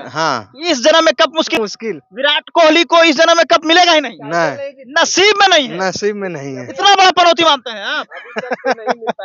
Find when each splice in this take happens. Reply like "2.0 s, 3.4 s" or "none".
1.5 s